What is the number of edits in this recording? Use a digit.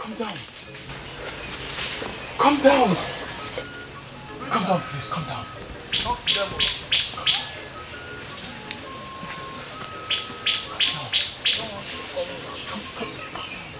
0